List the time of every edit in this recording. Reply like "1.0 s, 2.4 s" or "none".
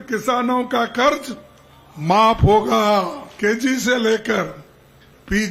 3.3 s

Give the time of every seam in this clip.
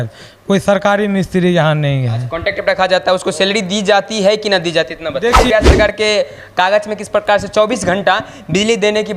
5.4 s

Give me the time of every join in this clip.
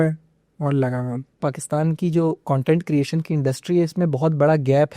1.5 s

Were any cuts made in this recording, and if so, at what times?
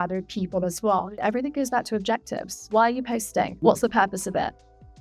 1.2 s, 2.7 s, 3.5 s

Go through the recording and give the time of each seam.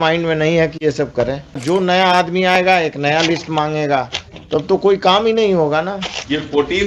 1.6 s

